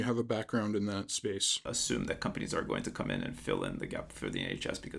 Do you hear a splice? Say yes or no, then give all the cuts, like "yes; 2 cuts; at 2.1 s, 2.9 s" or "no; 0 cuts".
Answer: yes; 1 cut; at 1.7 s